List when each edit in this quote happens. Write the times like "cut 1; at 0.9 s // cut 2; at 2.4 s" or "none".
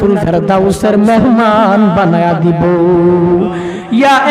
none